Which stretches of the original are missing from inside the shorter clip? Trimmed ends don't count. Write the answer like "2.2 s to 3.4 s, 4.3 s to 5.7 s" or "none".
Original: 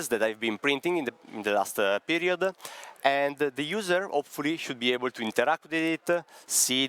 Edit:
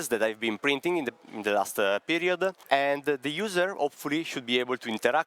2.6 s to 2.9 s